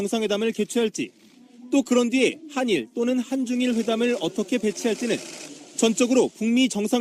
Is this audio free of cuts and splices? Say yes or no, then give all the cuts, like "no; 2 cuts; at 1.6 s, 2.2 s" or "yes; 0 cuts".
no; 1 cut; at 1.5 s